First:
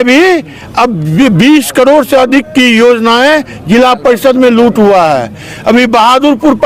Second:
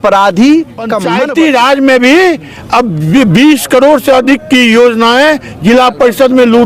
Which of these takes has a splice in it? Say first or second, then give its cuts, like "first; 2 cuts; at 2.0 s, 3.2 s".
second; 1 cut; at 1.0 s